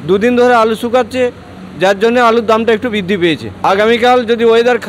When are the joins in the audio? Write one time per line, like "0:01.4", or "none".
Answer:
0:03.6

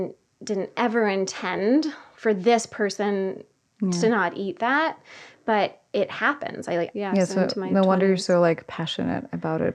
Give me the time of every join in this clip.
0:06.9

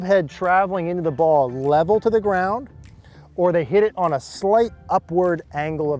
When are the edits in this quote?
none

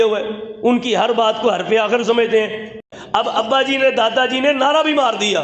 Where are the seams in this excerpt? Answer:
0:02.8

